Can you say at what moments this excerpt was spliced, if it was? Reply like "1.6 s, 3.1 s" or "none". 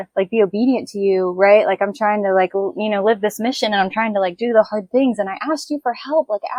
none